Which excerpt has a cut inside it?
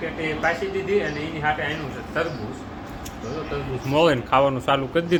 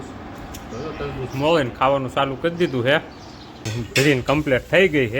second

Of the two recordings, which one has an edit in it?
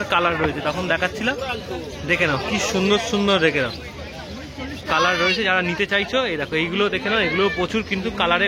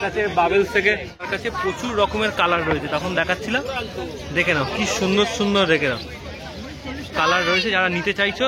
second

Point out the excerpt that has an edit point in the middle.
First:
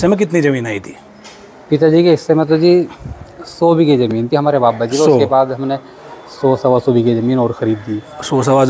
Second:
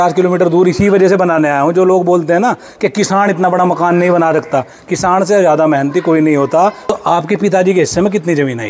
second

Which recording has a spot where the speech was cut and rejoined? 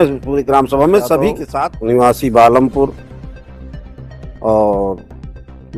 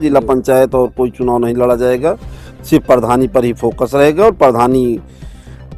first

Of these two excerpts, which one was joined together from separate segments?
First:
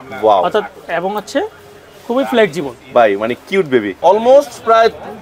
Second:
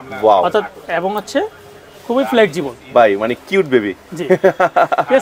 first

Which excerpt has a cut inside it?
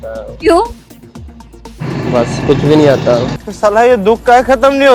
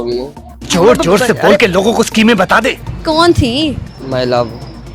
second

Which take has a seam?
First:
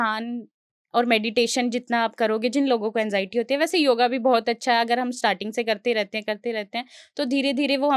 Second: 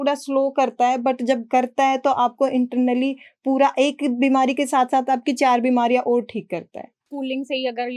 second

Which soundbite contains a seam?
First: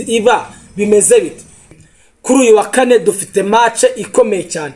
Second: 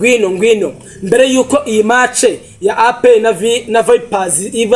first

